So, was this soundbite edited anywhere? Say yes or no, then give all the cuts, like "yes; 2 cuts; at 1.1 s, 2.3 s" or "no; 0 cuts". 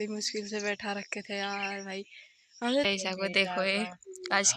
yes; 1 cut; at 2.8 s